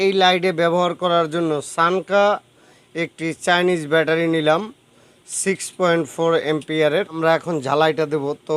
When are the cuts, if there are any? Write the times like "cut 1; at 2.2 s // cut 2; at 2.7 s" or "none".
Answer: cut 1; at 7.1 s